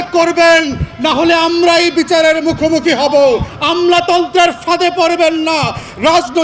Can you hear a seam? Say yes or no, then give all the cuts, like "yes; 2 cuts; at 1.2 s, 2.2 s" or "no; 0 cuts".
yes; 1 cut; at 3.5 s